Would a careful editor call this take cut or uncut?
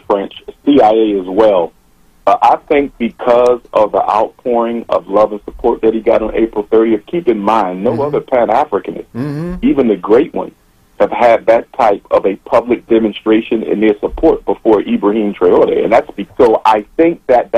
cut